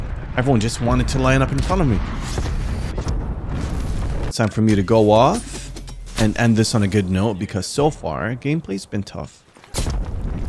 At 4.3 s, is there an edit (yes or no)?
yes